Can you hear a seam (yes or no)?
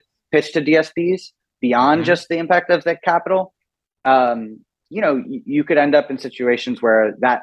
no